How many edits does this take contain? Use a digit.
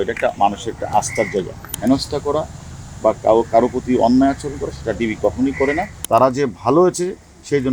2